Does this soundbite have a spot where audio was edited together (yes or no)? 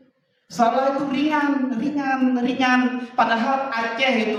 no